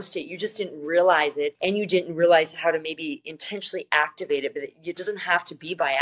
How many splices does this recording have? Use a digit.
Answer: 1